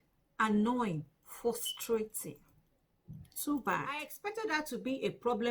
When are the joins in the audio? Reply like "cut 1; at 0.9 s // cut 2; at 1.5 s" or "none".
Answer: cut 1; at 4.2 s